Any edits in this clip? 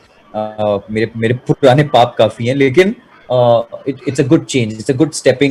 no; 0 cuts

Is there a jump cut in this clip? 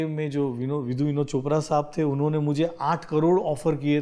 no; 0 cuts

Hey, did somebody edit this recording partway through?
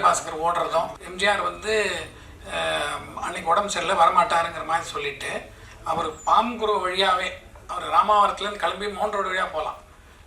yes; 1 cut; at 1.0 s

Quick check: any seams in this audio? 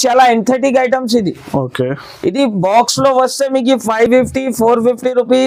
no; 0 cuts

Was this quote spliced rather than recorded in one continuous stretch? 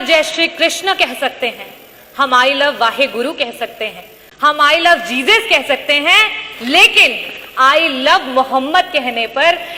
no; 0 cuts

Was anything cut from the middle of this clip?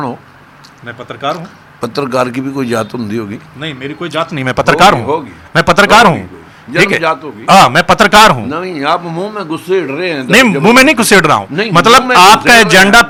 no; 0 cuts

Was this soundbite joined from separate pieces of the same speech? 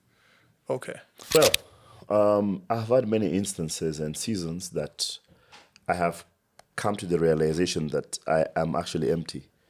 yes; 1 cut; at 1.3 s

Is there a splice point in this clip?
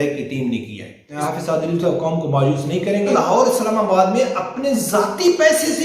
yes; 2 cuts; at 1.1 s, 3.1 s

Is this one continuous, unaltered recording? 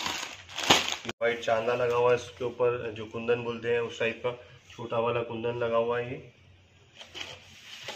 no; 1 cut; at 1.0 s

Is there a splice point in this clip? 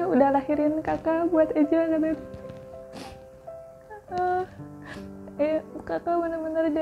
no; 0 cuts

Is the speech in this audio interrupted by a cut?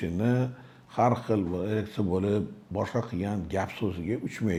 no; 0 cuts

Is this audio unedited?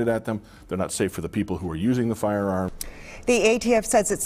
no; 1 cut; at 2.8 s

